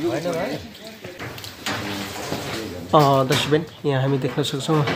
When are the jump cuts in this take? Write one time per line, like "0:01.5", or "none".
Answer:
0:01.3